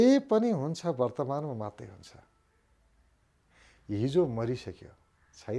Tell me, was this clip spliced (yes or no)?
no